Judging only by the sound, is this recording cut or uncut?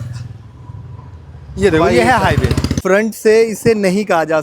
cut